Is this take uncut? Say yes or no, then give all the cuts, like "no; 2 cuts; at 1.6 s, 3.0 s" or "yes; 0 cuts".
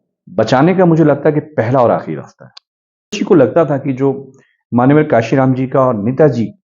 no; 1 cut; at 3.2 s